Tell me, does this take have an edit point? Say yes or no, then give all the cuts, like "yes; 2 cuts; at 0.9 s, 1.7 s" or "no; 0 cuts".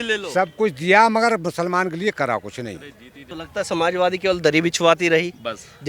yes; 1 cut; at 3.3 s